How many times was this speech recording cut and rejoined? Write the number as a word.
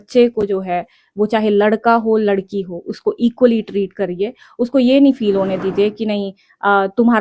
zero